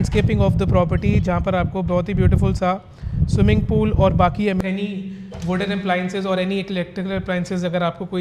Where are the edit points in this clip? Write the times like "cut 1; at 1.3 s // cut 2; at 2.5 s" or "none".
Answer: cut 1; at 4.6 s

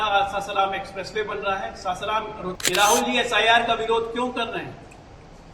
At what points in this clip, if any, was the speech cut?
cut 1; at 2.6 s

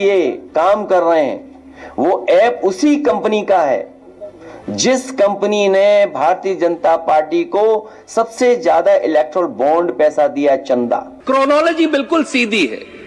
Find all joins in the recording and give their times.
cut 1; at 11.1 s

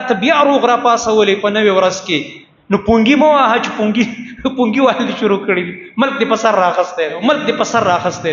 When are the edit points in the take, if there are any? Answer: cut 1; at 7.2 s

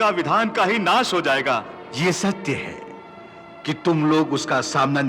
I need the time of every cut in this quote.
cut 1; at 1.8 s

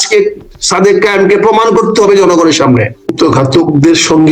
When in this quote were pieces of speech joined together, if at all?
cut 1; at 3.1 s

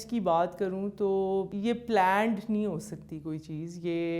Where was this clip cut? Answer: cut 1; at 1.5 s

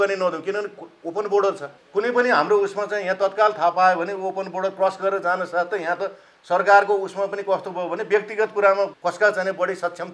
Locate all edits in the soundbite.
cut 1; at 1.7 s // cut 2; at 9.0 s

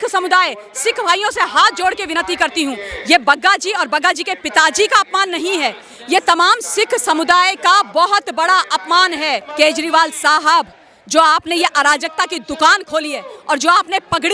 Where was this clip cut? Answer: cut 1; at 9.4 s

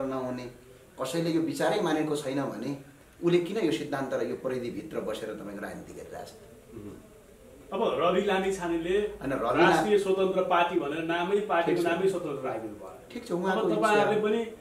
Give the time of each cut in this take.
none

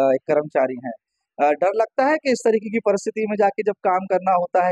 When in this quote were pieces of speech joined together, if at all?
none

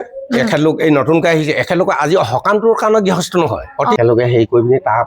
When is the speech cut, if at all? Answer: cut 1; at 4.0 s

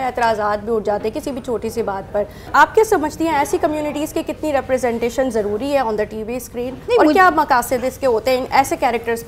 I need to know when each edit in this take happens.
none

